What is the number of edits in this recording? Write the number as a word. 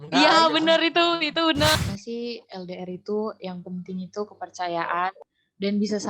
one